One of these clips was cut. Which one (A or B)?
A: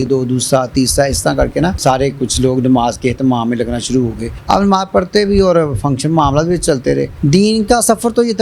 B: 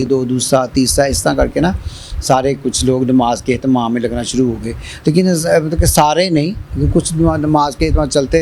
A